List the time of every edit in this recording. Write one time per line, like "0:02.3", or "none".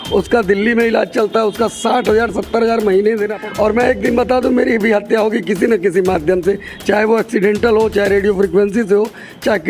0:03.4